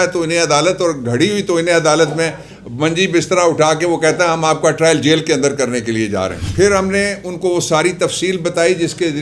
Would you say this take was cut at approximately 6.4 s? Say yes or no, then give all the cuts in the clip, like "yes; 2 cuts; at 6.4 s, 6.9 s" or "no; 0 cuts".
yes; 1 cut; at 6.4 s